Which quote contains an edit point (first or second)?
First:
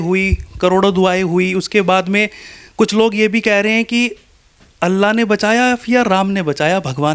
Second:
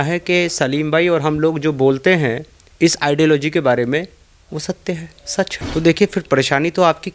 second